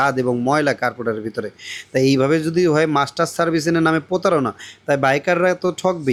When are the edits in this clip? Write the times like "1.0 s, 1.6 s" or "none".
none